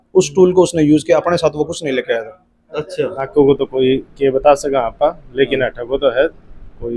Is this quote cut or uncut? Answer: cut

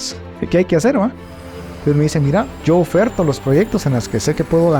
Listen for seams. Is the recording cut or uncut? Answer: cut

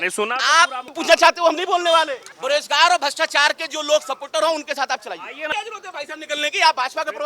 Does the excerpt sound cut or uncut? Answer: cut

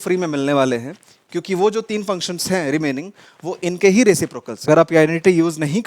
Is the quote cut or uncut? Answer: cut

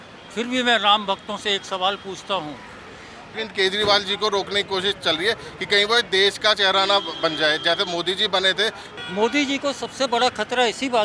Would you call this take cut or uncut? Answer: cut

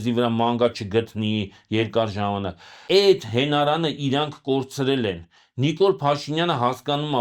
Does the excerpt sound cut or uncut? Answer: uncut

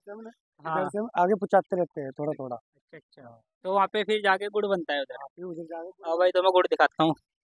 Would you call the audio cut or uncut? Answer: uncut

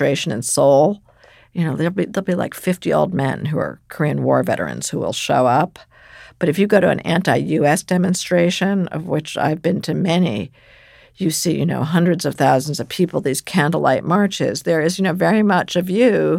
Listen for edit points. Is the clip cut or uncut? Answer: uncut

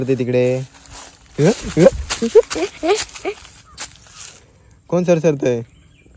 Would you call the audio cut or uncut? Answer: uncut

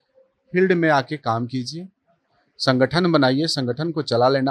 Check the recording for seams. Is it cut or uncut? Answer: uncut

